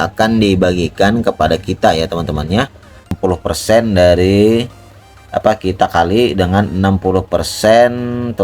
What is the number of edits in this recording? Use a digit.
1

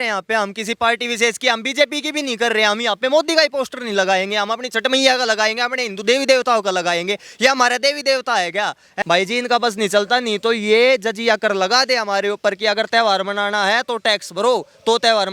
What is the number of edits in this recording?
1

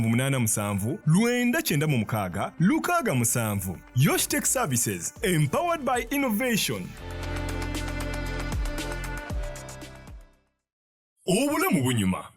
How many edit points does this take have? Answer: 1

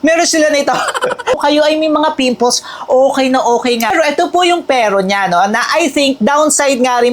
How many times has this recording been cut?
2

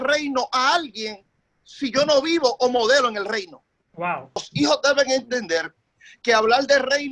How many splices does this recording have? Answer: 1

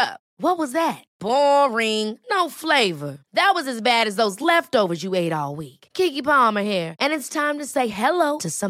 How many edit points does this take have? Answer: 0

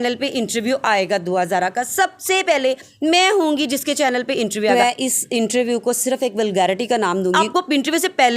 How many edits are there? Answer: 2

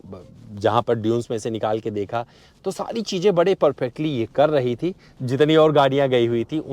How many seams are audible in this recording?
1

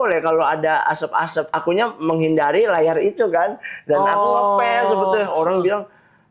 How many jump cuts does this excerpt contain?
2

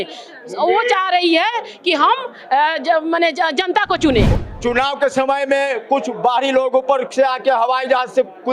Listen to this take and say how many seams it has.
1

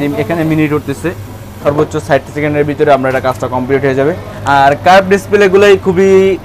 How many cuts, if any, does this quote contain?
0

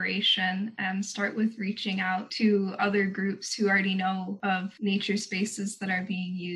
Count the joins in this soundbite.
2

